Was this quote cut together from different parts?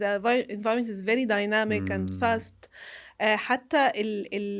no; 0 cuts

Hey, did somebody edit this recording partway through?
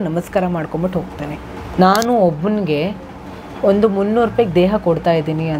yes; 1 cut; at 1.6 s

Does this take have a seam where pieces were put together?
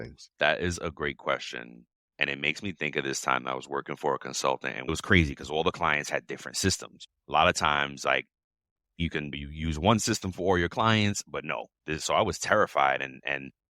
no; 0 cuts

